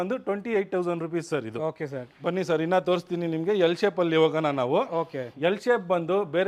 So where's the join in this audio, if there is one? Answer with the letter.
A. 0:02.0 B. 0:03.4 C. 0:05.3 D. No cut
D